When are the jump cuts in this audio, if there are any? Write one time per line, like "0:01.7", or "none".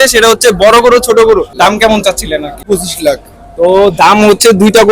0:01.5
0:02.6